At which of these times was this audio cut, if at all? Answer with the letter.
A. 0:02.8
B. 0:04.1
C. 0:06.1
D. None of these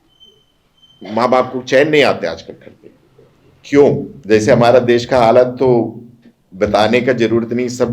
B